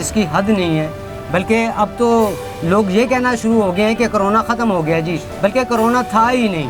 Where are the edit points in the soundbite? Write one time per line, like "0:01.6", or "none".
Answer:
none